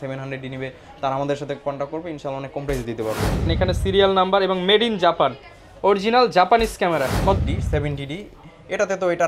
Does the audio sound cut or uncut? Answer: cut